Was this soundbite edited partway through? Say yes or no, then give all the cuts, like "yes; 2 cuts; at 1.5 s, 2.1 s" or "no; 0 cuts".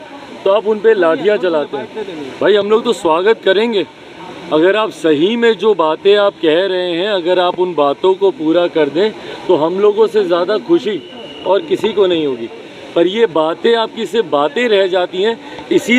no; 0 cuts